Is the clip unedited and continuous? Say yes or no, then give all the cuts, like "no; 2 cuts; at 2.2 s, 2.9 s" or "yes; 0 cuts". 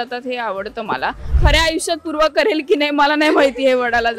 no; 1 cut; at 1.4 s